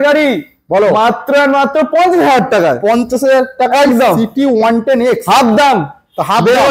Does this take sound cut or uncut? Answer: uncut